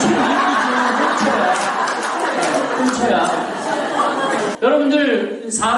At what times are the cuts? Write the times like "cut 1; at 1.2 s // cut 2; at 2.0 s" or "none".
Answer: cut 1; at 4.5 s